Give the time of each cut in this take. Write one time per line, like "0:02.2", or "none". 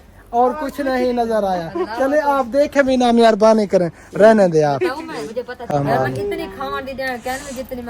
0:05.7